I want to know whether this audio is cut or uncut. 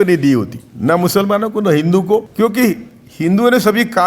cut